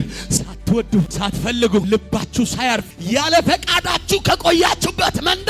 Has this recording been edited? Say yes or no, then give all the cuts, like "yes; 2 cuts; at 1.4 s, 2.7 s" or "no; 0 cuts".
yes; 2 cuts; at 1.1 s, 2.9 s